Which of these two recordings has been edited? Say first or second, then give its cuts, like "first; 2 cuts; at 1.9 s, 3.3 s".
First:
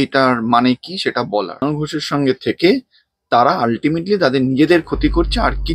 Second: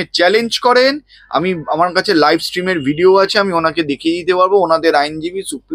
first; 1 cut; at 1.7 s